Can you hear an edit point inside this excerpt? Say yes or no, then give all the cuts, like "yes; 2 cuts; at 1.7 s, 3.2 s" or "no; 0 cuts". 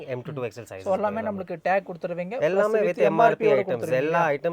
no; 0 cuts